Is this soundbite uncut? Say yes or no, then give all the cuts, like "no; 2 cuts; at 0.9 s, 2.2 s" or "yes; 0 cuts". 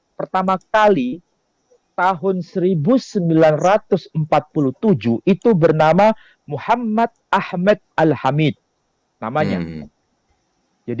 yes; 0 cuts